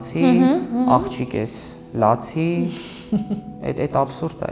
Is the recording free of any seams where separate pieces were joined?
yes; 0 cuts

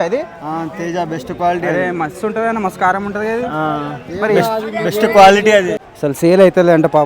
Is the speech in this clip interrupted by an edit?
yes; 1 cut; at 5.8 s

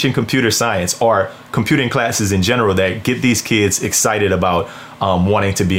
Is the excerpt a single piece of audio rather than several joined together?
yes; 0 cuts

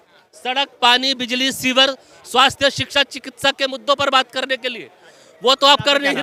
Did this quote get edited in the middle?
no; 0 cuts

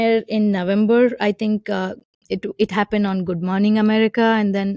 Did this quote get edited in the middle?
no; 0 cuts

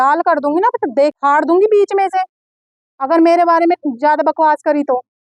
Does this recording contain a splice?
no; 0 cuts

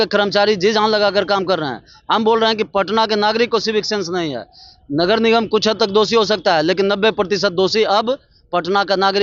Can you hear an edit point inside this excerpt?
no; 0 cuts

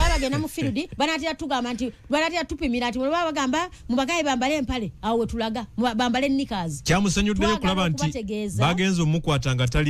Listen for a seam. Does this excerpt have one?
no; 0 cuts

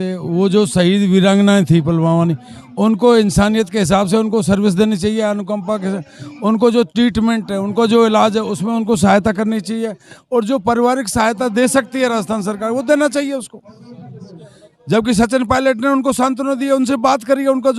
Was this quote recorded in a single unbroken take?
yes; 0 cuts

